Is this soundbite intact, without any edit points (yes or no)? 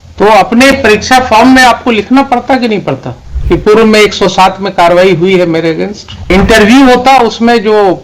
no